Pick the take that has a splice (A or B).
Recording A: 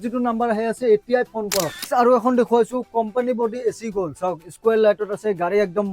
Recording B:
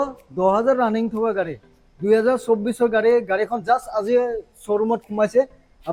A